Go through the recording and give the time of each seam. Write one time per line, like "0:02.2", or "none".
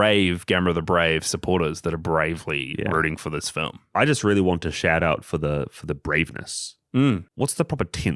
0:07.3